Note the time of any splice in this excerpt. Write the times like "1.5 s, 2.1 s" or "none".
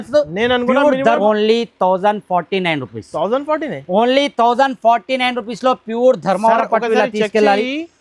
1.2 s